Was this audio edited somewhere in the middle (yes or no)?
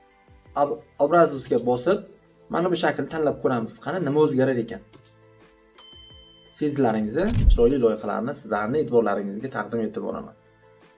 yes